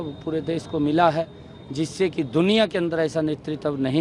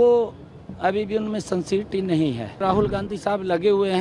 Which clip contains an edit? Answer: second; 1 cut; at 2.6 s

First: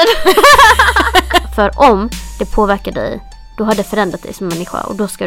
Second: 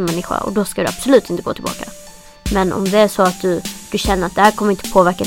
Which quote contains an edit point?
first; 1 cut; at 1.5 s

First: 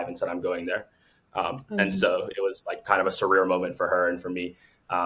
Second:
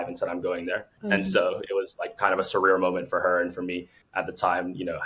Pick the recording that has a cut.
second; 2 cuts; at 0.9 s, 4.0 s

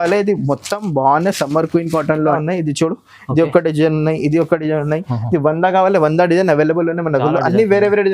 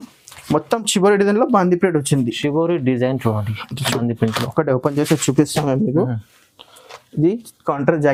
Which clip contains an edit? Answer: first; 1 cut; at 2.4 s

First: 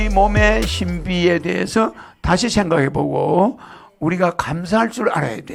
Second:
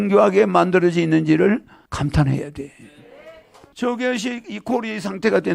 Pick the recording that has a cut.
second; 2 cuts; at 1.8 s, 3.6 s

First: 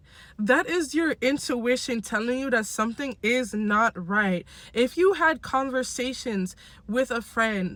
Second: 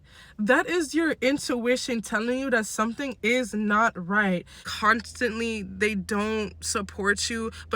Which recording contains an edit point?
second; 1 cut; at 4.6 s

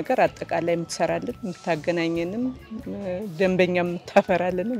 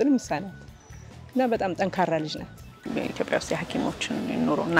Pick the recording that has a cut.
second; 1 cut; at 2.8 s

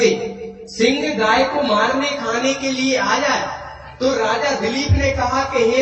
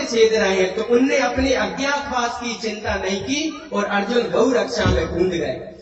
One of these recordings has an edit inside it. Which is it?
first; 1 cut; at 3.0 s

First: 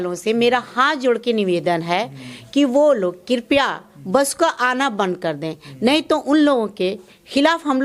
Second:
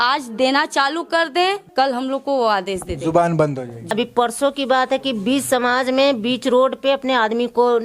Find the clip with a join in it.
second; 2 cuts; at 1.7 s, 3.9 s

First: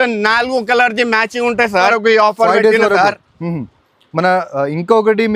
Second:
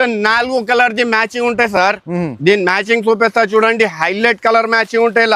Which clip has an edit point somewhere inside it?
first; 1 cut; at 1.8 s

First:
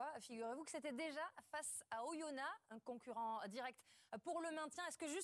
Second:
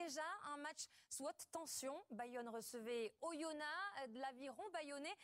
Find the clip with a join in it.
first; 1 cut; at 2.7 s

